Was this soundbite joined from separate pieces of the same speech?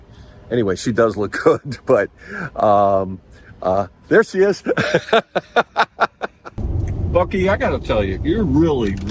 yes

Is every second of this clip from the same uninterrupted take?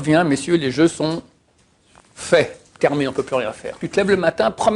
no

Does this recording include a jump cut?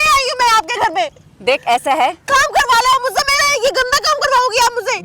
no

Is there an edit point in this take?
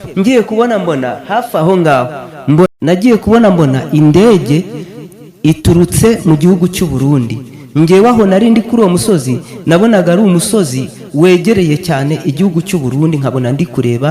yes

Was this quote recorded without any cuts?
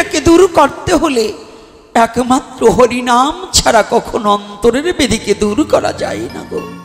yes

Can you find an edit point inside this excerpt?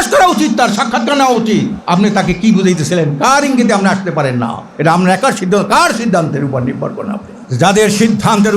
yes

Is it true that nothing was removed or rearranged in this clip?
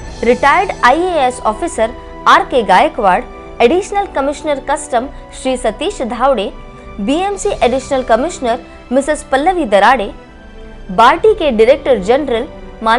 yes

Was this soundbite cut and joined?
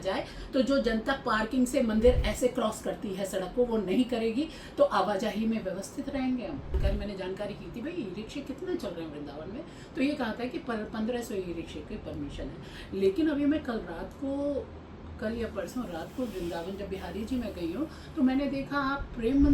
yes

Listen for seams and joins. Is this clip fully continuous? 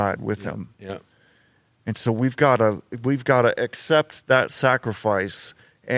yes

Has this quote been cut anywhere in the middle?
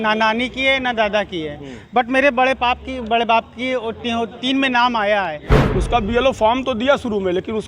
yes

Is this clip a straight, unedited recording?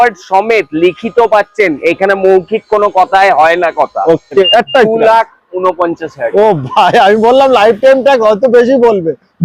no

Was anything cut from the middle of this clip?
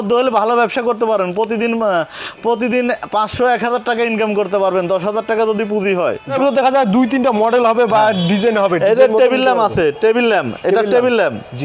yes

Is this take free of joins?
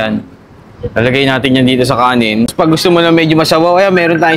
no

